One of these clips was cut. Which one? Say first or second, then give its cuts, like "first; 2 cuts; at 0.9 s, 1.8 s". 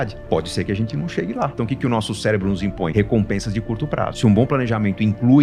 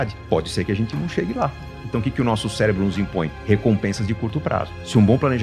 first; 3 cuts; at 1.5 s, 2.9 s, 4.1 s